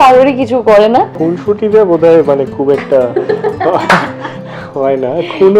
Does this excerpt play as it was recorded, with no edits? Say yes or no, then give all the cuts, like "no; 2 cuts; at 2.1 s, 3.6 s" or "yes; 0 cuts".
no; 1 cut; at 1.1 s